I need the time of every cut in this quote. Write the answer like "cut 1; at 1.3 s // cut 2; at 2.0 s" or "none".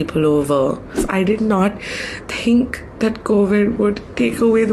cut 1; at 0.9 s